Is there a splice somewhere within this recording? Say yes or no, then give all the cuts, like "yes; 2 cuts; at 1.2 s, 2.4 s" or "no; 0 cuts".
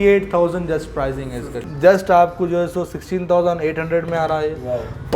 yes; 1 cut; at 1.5 s